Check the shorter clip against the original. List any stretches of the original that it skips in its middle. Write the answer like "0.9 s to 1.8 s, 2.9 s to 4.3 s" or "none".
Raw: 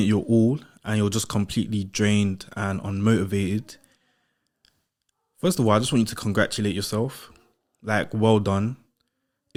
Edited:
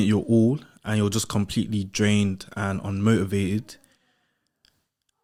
none